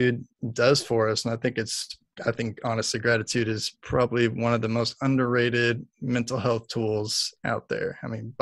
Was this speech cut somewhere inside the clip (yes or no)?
no